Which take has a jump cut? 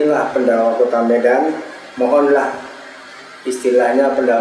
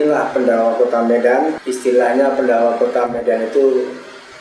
second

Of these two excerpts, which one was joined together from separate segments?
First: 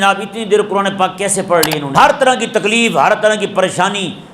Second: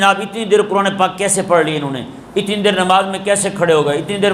first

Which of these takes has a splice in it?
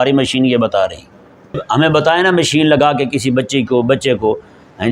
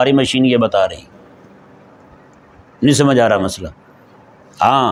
first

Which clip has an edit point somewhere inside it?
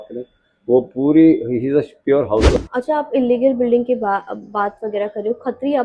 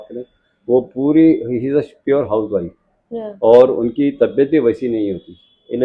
first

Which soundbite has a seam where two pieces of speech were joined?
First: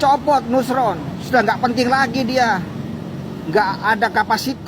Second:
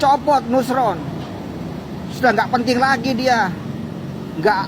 first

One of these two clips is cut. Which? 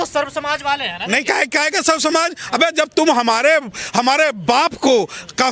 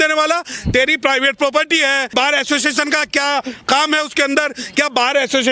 second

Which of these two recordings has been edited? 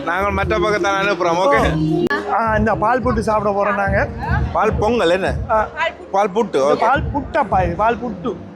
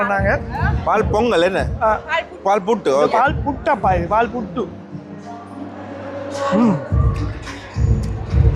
first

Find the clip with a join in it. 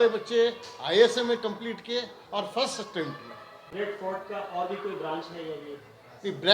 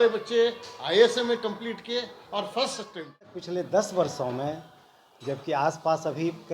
second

